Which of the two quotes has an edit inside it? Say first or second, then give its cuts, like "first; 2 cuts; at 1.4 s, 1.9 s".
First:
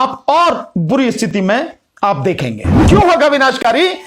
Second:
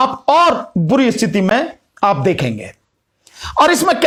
first; 1 cut; at 2.8 s